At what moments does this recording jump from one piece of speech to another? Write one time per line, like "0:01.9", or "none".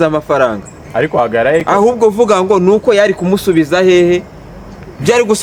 none